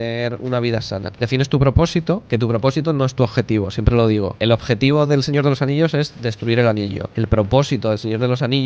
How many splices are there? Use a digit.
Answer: 4